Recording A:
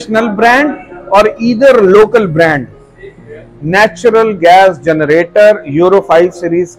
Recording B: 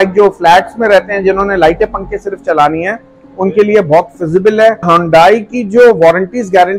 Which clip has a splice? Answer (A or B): B